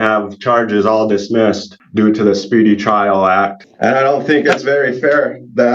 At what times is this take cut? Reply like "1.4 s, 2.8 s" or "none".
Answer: 1.7 s, 3.6 s